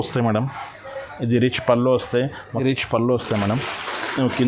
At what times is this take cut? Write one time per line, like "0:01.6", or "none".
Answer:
0:02.6